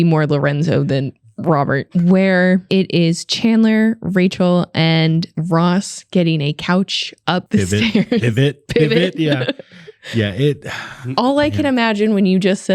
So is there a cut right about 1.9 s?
yes; 2 cuts; at 1.9 s, 2.6 s

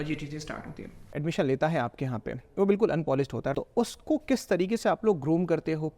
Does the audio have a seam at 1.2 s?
yes; 2 cuts; at 1.2 s, 3.5 s

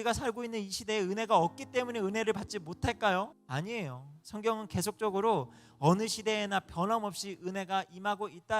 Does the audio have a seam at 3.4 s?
yes; 1 cut; at 3.4 s

